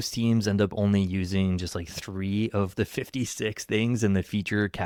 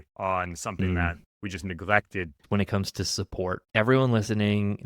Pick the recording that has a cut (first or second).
second